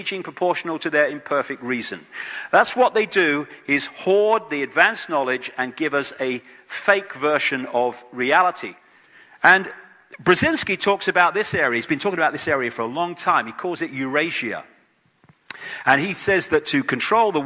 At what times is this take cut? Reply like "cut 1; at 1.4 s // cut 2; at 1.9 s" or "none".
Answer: none